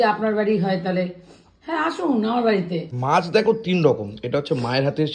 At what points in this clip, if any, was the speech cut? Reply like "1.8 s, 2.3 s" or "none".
2.9 s

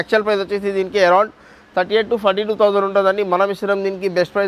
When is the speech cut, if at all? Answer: none

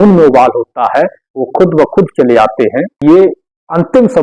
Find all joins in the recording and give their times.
2.9 s

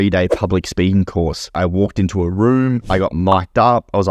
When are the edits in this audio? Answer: 1.5 s, 2.8 s

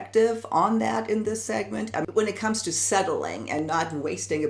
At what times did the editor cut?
2.0 s

